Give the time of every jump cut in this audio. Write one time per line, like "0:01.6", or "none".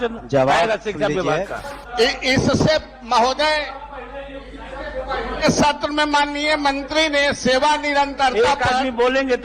0:01.9

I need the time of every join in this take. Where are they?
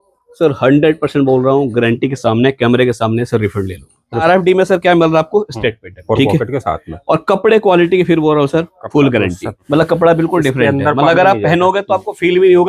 0:04.2
0:05.9
0:09.6

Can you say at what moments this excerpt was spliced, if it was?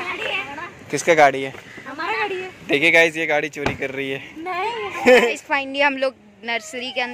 0:05.3

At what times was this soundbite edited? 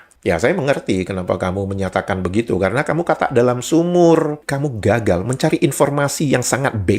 0:04.4

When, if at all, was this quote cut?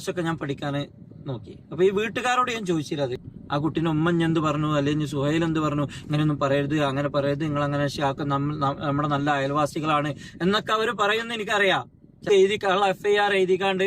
0:03.2
0:12.3

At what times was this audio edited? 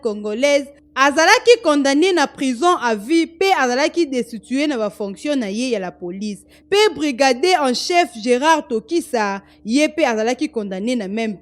none

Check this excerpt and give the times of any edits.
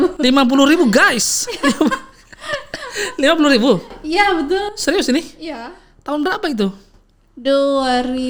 none

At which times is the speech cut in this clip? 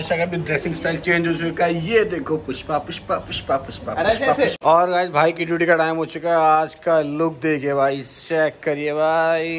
0:04.6

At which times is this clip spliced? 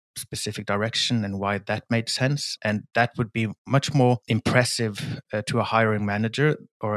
0:03.6

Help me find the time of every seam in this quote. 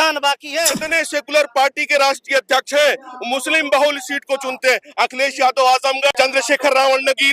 0:00.8
0:06.1

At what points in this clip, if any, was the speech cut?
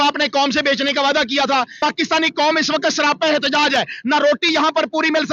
0:01.7

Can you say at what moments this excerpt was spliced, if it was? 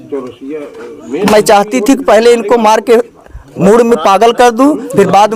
none

